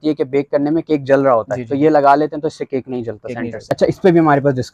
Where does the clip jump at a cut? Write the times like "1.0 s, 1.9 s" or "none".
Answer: 3.7 s